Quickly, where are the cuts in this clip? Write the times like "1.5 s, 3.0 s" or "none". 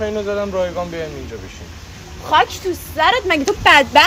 none